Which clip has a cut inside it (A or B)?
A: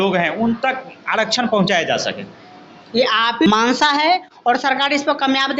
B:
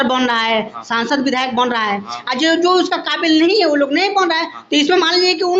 A